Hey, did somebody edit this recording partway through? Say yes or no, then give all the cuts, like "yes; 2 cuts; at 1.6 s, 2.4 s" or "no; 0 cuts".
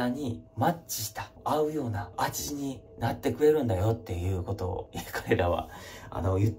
no; 0 cuts